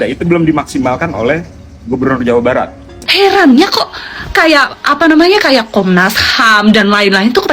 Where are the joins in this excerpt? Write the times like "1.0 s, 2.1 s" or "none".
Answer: 2.9 s